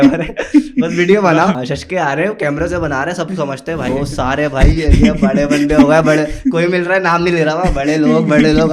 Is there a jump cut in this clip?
yes; 2 cuts; at 1.6 s, 3.9 s

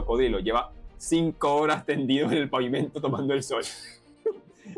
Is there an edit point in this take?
no; 0 cuts

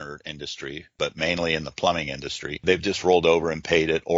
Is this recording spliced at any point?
yes; 2 cuts; at 0.9 s, 2.6 s

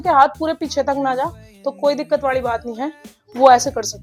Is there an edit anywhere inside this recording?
no; 0 cuts

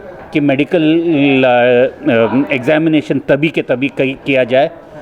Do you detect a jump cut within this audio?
no; 0 cuts

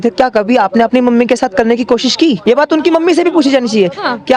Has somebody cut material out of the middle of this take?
yes; 1 cut; at 2.4 s

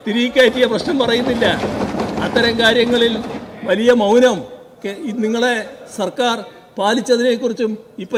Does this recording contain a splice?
no; 0 cuts

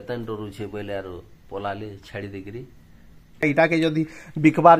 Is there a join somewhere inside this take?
yes; 1 cut; at 3.4 s

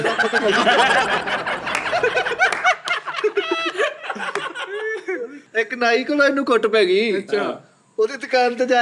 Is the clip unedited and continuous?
no; 1 cut; at 5.4 s

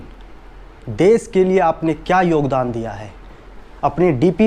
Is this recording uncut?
no; 1 cut; at 3.4 s

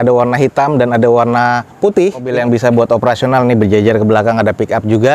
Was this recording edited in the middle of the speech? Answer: yes; 1 cut; at 2.3 s

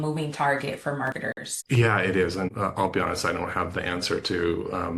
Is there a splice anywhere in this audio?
yes; 2 cuts; at 1.2 s, 2.5 s

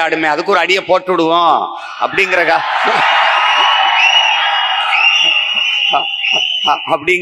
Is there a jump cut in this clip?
no; 0 cuts

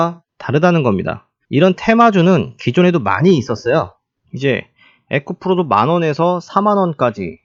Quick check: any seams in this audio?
no; 0 cuts

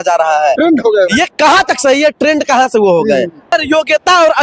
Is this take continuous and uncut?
no; 1 cut; at 3.5 s

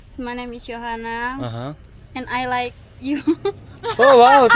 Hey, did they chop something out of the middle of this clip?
no; 0 cuts

